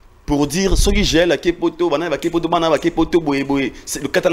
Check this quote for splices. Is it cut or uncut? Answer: uncut